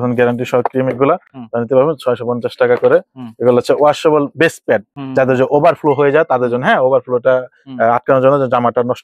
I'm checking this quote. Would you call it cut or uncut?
uncut